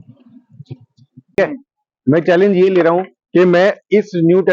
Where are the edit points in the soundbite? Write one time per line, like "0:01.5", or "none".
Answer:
0:01.4